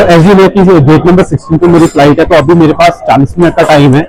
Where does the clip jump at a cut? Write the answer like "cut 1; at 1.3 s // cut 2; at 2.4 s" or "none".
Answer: none